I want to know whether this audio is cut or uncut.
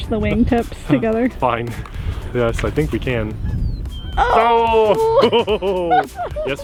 uncut